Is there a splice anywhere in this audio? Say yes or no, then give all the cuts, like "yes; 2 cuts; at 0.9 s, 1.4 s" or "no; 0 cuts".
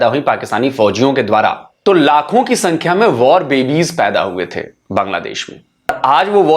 yes; 2 cuts; at 1.7 s, 5.9 s